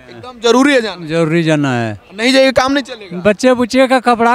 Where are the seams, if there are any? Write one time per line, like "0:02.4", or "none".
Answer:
none

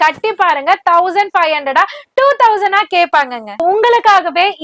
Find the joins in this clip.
0:03.6

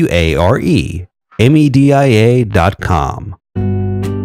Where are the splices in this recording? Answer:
0:03.3

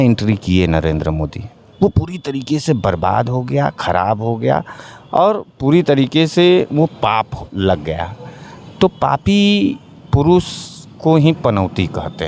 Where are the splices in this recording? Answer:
none

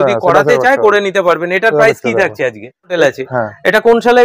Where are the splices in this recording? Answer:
0:02.9

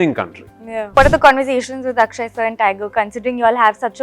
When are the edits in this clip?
0:01.0

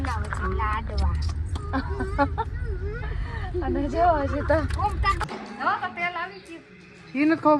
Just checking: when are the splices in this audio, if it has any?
0:05.2

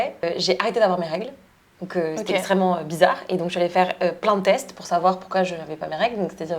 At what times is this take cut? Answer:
none

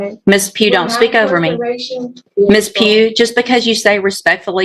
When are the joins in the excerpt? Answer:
0:02.2

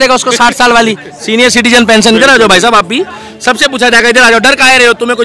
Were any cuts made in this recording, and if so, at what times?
none

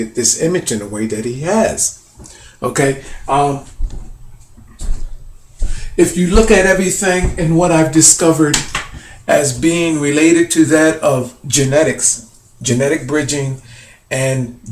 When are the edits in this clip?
0:06.2

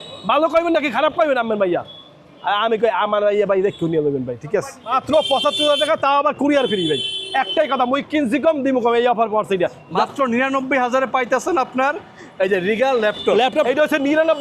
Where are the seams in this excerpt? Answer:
0:04.8
0:09.8
0:13.7

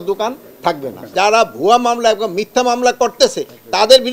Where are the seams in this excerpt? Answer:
0:01.1

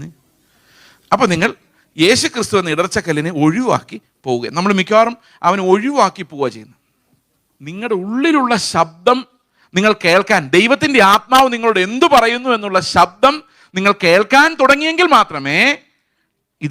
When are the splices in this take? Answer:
0:07.8

